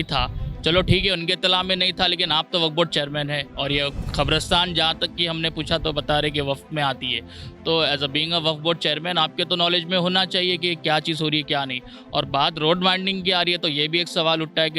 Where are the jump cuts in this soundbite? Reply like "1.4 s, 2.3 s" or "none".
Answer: none